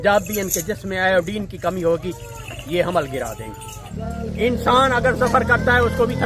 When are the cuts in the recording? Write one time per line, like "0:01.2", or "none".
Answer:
0:03.8